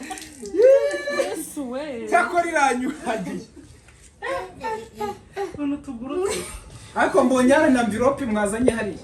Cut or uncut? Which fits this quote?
uncut